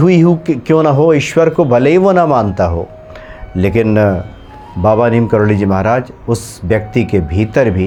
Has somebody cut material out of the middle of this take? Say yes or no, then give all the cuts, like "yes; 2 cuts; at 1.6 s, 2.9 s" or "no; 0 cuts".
no; 0 cuts